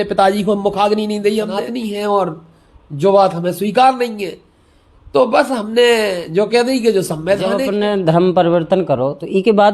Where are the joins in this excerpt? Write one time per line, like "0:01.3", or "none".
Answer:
0:01.6
0:07.6